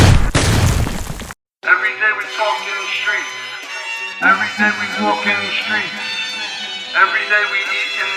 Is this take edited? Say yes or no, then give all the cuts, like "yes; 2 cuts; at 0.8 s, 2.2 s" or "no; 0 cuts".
no; 0 cuts